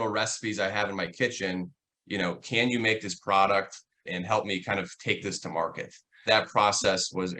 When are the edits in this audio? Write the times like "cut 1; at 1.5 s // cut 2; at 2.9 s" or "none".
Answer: cut 1; at 4.1 s // cut 2; at 6.2 s

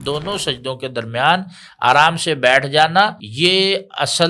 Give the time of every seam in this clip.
cut 1; at 3.2 s

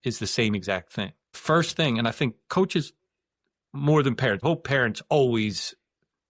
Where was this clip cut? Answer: cut 1; at 1.2 s // cut 2; at 4.4 s

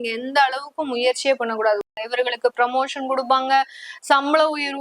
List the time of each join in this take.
cut 1; at 1.9 s

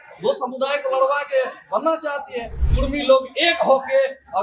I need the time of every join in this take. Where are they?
cut 1; at 2.6 s

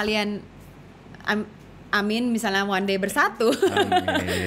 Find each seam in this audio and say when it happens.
none

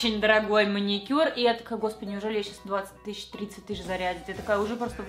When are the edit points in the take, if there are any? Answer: none

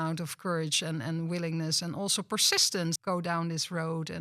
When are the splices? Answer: cut 1; at 3.0 s

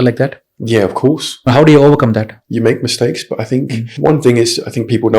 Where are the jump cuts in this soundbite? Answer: cut 1; at 1.3 s // cut 2; at 2.4 s // cut 3; at 3.8 s

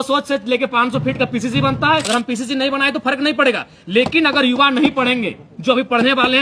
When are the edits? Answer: cut 1; at 2.0 s

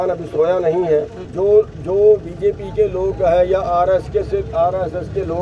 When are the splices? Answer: cut 1; at 1.3 s

